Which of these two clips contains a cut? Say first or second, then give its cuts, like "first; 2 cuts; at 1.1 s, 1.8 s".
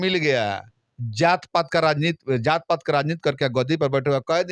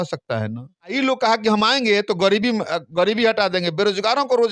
second; 1 cut; at 0.9 s